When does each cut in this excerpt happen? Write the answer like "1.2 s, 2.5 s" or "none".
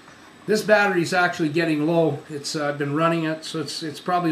2.0 s